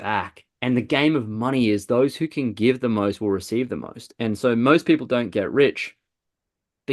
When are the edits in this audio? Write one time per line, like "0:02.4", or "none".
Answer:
none